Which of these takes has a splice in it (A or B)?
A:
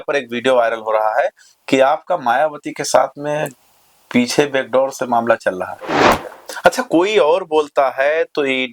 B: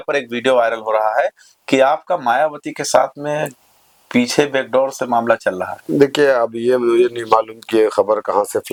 A